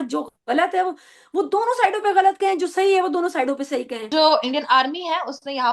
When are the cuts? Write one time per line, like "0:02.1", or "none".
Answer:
0:04.0

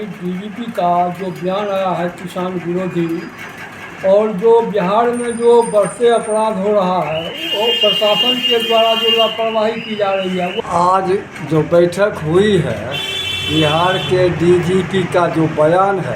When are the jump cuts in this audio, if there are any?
0:10.6

